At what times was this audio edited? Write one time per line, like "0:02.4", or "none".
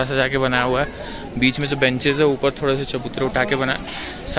none